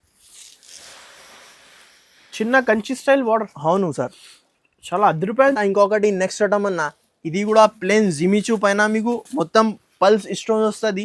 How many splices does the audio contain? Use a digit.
1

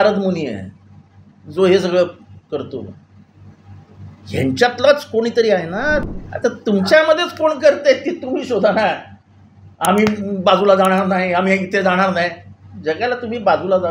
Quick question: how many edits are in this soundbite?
1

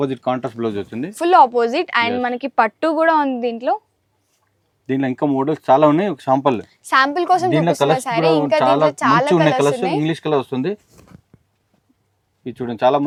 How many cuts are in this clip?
0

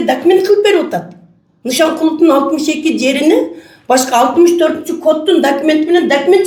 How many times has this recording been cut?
0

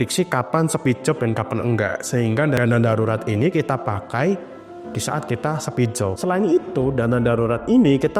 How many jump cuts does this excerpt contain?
0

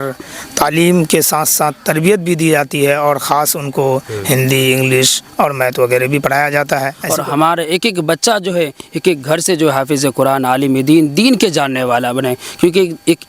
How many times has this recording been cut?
1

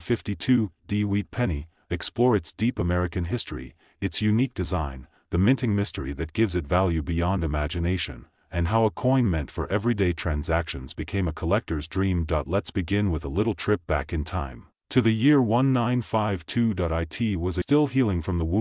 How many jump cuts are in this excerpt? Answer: 1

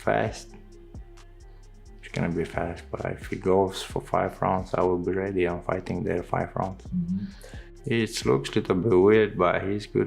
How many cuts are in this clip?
1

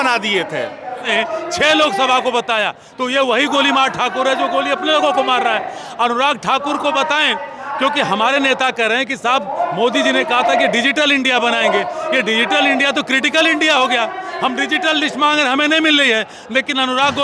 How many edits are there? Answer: 1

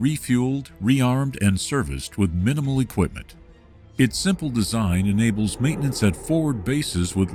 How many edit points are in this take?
0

